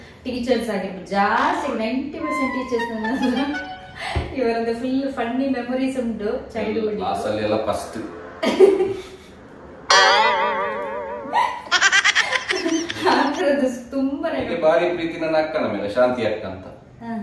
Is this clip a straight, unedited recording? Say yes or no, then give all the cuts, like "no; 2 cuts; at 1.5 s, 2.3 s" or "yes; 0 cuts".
no; 2 cuts; at 7.0 s, 14.5 s